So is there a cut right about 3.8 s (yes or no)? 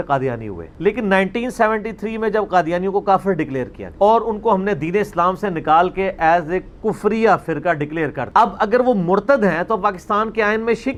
no